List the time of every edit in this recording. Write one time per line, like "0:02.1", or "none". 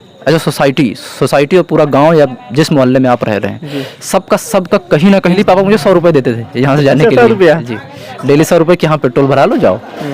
0:05.4